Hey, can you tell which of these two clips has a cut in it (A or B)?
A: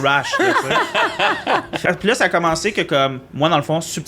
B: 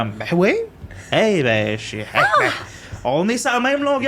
A